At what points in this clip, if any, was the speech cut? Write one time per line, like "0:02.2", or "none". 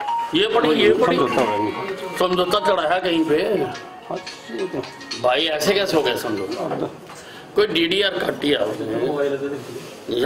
0:01.1